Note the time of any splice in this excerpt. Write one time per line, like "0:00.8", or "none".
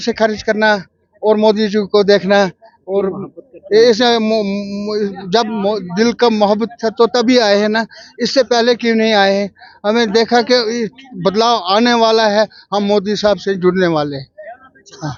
none